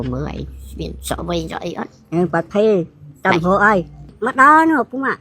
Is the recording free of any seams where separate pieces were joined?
no; 1 cut; at 4.1 s

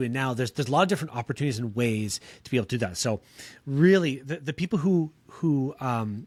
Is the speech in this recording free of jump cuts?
yes; 0 cuts

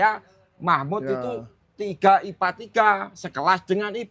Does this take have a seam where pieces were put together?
no; 0 cuts

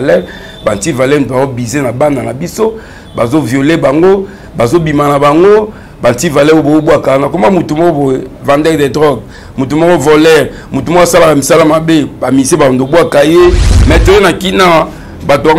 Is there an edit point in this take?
yes; 1 cut; at 13.7 s

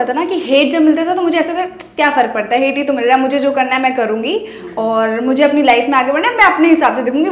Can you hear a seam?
no; 0 cuts

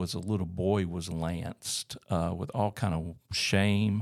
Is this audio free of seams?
yes; 0 cuts

